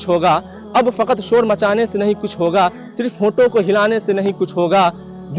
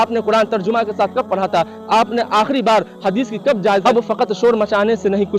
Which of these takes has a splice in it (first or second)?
second